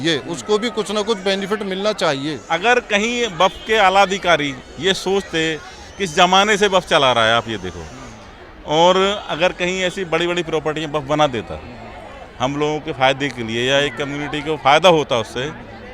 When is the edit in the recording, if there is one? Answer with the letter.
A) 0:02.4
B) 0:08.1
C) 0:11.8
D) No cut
A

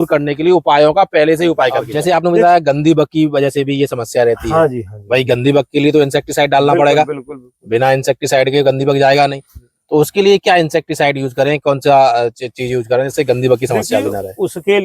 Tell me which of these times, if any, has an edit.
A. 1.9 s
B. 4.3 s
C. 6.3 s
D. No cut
A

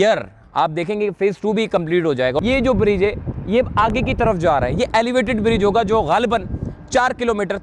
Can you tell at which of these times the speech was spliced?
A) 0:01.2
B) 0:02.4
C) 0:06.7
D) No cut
B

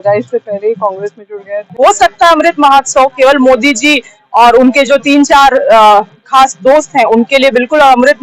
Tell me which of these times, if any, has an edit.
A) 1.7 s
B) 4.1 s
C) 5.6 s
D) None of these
A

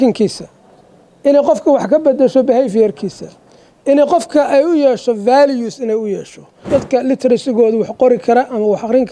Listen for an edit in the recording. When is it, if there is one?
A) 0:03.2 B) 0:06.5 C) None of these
B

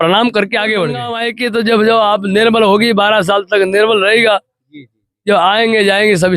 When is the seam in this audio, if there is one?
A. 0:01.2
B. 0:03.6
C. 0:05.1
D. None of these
A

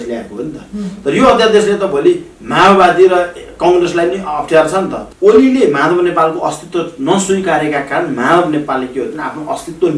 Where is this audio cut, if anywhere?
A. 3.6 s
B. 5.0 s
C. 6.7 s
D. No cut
B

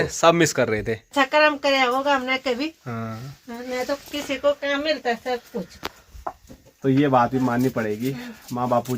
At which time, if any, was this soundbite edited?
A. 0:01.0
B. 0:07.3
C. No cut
A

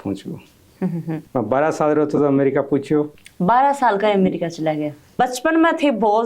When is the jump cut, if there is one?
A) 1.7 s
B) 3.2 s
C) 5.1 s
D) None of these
C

